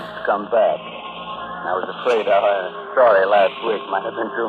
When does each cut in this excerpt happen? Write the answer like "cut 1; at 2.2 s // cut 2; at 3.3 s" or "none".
none